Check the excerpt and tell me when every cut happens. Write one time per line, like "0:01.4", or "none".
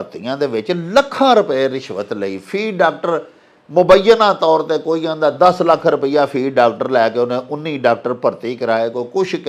none